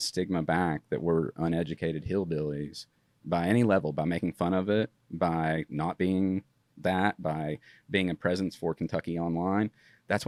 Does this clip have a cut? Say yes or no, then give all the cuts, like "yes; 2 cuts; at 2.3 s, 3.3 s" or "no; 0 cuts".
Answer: no; 0 cuts